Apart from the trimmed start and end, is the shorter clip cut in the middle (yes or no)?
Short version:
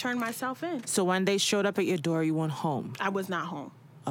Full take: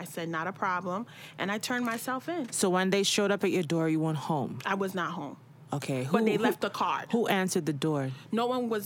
no